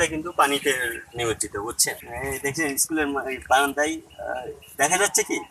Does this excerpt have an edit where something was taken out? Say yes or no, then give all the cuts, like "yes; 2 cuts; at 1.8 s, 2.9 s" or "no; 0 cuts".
yes; 1 cut; at 2.0 s